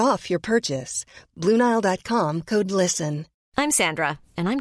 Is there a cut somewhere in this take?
no; 0 cuts

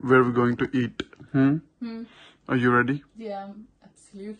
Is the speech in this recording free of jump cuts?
yes; 0 cuts

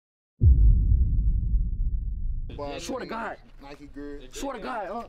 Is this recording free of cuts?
no; 1 cut; at 2.5 s

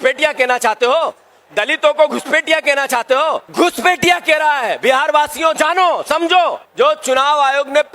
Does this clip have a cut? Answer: yes; 2 cuts; at 3.5 s, 6.6 s

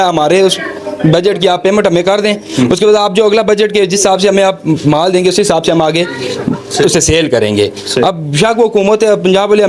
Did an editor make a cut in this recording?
no; 0 cuts

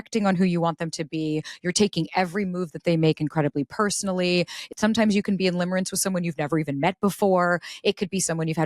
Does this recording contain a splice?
yes; 1 cut; at 4.7 s

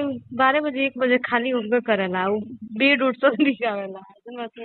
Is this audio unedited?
yes; 0 cuts

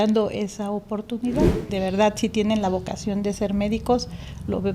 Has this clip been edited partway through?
yes; 1 cut; at 1.7 s

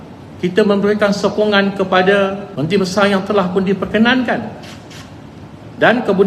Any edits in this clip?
yes; 1 cut; at 2.5 s

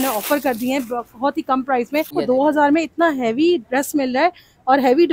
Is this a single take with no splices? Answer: no; 1 cut; at 2.1 s

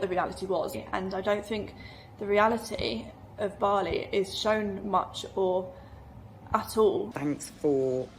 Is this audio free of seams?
no; 1 cut; at 7.1 s

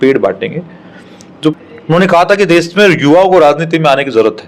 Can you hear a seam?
yes; 1 cut; at 1.6 s

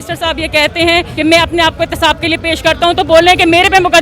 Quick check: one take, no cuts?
no; 1 cut; at 1.1 s

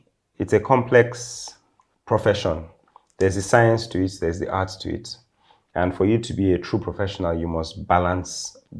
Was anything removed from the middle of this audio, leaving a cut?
no; 0 cuts

